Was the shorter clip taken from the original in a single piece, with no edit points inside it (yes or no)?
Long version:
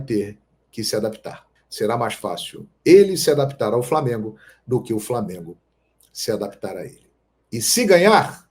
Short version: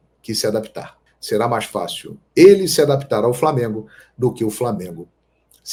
yes